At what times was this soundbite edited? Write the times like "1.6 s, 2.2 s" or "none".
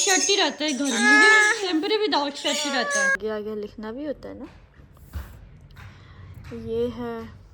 3.2 s